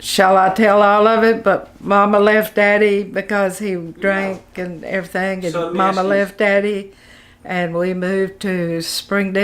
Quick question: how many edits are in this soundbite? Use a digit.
0